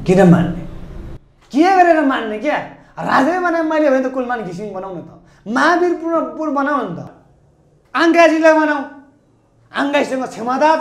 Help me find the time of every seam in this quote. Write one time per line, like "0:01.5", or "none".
0:07.1